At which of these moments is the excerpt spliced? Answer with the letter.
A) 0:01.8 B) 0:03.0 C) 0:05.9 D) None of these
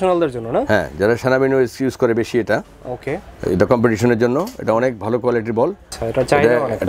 C